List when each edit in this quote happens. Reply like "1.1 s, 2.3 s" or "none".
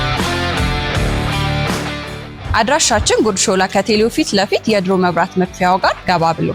none